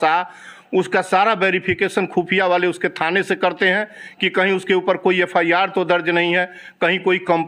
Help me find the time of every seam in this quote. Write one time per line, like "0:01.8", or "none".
none